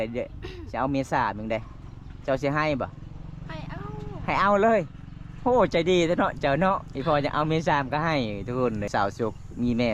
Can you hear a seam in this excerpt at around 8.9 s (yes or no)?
yes